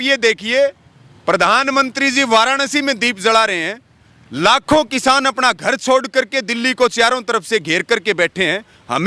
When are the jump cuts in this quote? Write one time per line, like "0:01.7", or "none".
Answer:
none